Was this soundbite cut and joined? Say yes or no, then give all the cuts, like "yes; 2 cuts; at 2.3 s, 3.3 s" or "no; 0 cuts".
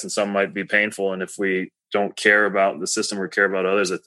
yes; 1 cut; at 1.8 s